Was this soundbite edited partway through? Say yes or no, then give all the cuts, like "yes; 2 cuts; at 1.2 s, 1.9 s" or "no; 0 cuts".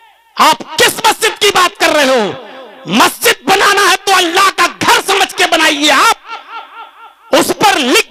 no; 0 cuts